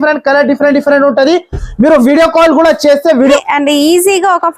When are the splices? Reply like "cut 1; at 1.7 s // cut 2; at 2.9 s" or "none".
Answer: cut 1; at 3.4 s